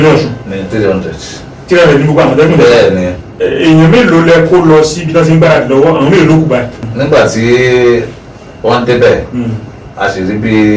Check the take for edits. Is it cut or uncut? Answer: cut